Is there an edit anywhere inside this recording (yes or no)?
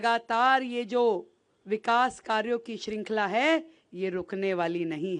no